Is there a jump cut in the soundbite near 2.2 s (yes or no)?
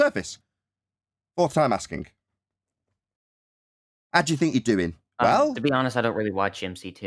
no